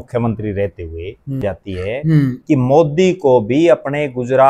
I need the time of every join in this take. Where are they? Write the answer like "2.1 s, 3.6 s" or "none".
1.4 s